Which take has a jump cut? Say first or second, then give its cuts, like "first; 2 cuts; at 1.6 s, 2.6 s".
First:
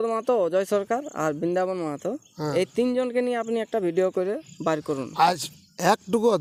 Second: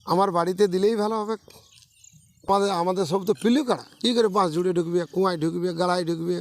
second; 1 cut; at 2.5 s